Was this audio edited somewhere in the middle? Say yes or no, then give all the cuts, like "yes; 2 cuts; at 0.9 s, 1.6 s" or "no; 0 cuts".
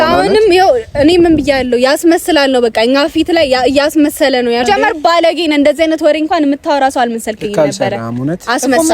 yes; 1 cut; at 4.6 s